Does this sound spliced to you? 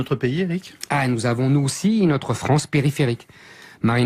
no; 0 cuts

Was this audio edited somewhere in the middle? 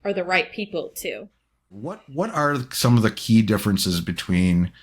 yes; 1 cut; at 2.0 s

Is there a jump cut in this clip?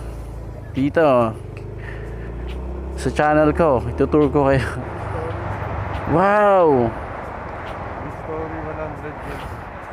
yes; 1 cut; at 4.8 s

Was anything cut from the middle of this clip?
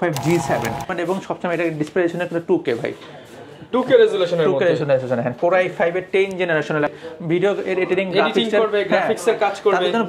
yes; 2 cuts; at 0.9 s, 6.9 s

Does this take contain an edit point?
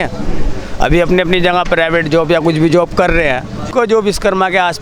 yes; 1 cut; at 3.7 s

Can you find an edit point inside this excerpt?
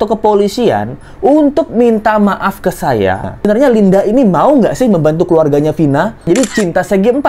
yes; 2 cuts; at 3.3 s, 6.3 s

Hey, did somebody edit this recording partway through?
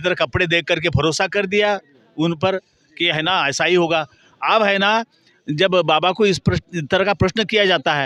no; 0 cuts

